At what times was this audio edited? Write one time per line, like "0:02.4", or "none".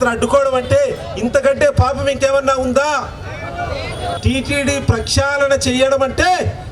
0:04.2